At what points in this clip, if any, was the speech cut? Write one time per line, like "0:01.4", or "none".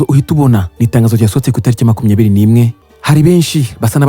0:02.8